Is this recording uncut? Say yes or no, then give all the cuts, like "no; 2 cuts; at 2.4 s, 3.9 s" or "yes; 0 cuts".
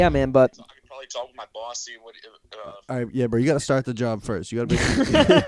yes; 0 cuts